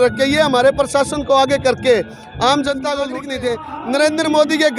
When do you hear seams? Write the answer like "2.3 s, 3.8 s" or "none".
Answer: 3.2 s